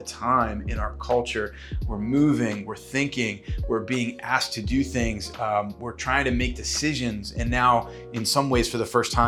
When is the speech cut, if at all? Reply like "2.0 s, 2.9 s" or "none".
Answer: none